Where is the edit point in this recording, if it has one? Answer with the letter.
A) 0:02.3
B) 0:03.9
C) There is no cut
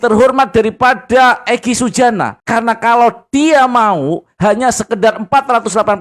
C